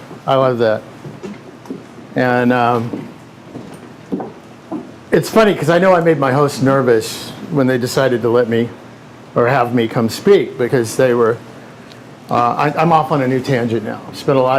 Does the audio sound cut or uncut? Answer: uncut